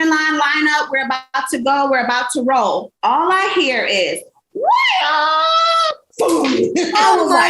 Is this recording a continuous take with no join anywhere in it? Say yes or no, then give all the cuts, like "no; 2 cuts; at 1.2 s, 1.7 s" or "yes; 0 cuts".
no; 1 cut; at 2.9 s